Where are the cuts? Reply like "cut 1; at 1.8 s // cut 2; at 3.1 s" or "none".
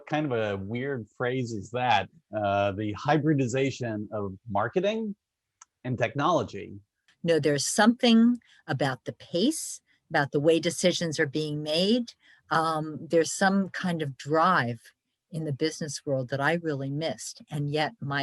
cut 1; at 7.1 s